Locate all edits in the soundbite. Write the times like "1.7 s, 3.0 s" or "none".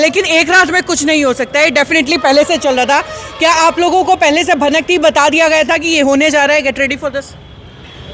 none